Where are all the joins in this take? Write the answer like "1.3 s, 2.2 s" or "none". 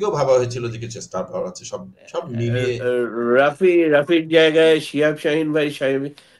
2.8 s

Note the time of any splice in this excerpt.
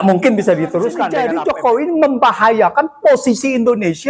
1.1 s

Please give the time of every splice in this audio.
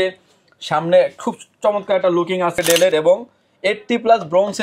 2.5 s

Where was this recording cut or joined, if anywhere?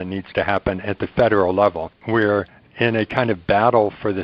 2.2 s

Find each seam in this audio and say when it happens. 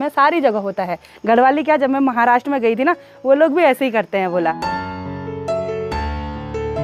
none

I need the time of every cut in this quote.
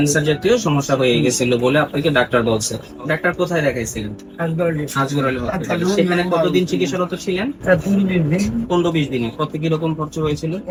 none

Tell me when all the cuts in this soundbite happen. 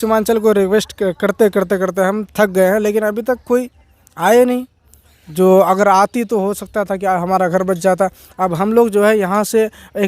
none

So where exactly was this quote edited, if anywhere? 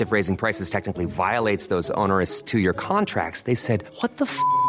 none

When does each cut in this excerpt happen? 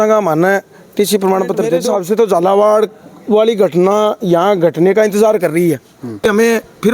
1.8 s, 6.2 s

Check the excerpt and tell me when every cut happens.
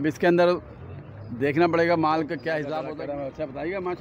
2.8 s

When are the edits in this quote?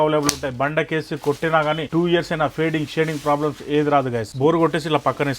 1.8 s, 4.3 s

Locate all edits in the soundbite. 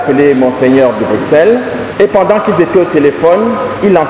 1.8 s

